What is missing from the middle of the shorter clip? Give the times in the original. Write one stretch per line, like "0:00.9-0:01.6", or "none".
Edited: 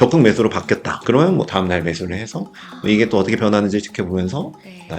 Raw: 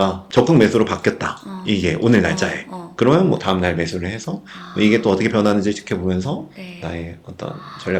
0:01.3-0:02.8